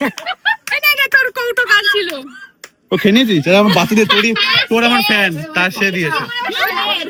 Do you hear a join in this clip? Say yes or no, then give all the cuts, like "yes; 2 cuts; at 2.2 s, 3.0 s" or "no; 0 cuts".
no; 0 cuts